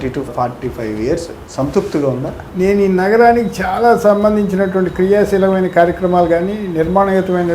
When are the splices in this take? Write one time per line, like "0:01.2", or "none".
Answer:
0:01.4
0:02.4